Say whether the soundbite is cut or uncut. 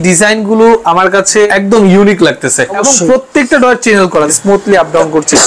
cut